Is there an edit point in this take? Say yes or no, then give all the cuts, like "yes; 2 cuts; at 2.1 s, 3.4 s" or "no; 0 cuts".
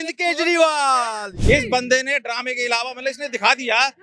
yes; 1 cut; at 1.3 s